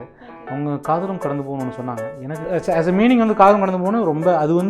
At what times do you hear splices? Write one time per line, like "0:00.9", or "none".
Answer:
0:02.4